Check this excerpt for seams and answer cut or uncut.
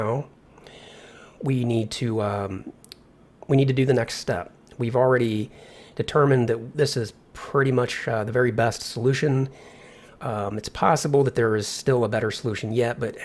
cut